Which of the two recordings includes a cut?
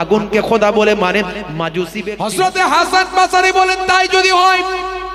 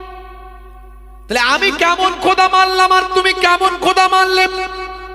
first; 1 cut; at 2.0 s

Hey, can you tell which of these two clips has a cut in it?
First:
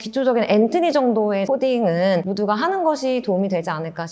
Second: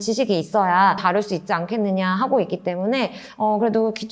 first; 1 cut; at 2.3 s

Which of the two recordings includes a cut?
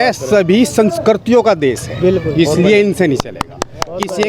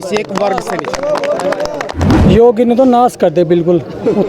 second; 1 cut; at 2.0 s

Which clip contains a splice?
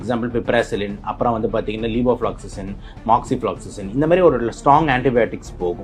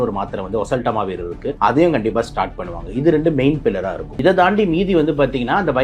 second; 2 cuts; at 1.5 s, 4.0 s

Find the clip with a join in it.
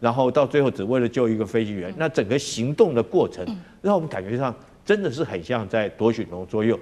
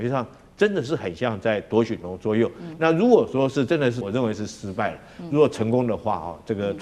second; 1 cut; at 4.0 s

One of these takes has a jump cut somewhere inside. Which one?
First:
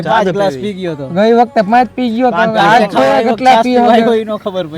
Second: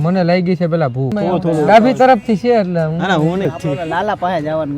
second; 2 cuts; at 1.1 s, 3.5 s

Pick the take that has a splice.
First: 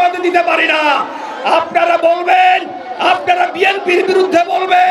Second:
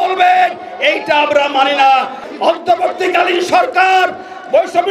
second; 1 cut; at 2.2 s

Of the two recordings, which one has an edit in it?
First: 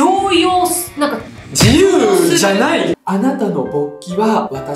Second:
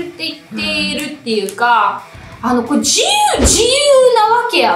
first; 1 cut; at 3.0 s

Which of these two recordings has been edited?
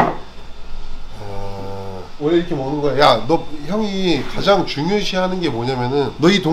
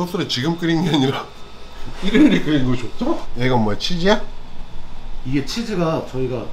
second; 1 cut; at 3.3 s

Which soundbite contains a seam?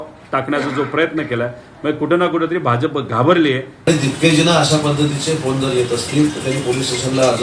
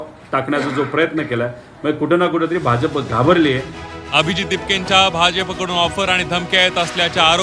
first; 1 cut; at 3.7 s

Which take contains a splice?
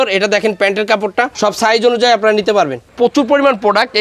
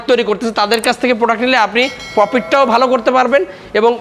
first; 2 cuts; at 1.3 s, 2.9 s

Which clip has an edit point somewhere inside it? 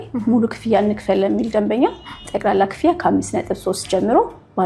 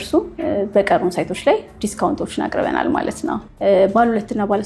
second; 1 cut; at 3.5 s

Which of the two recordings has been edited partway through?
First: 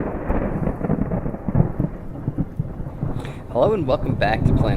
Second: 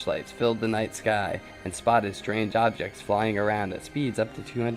first; 1 cut; at 1.4 s

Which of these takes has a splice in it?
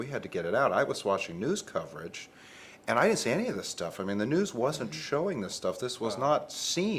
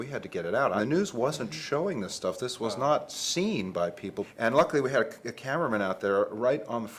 second; 2 cuts; at 0.8 s, 4.3 s

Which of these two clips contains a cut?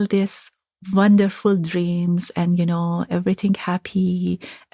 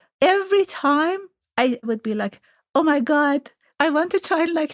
second; 2 cuts; at 1.7 s, 3.6 s

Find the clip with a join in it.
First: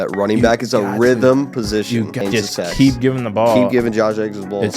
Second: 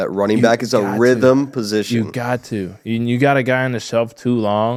first; 1 cut; at 2.1 s

